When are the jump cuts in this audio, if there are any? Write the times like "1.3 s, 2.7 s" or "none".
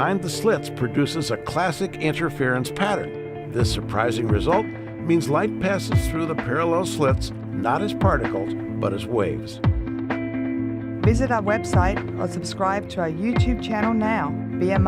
10.2 s